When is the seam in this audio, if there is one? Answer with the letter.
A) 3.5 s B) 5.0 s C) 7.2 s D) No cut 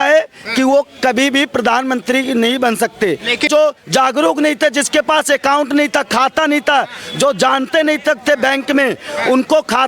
A